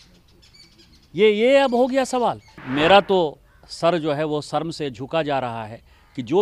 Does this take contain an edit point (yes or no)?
yes